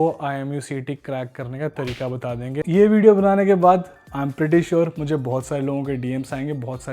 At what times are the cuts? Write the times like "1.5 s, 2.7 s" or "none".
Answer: 2.6 s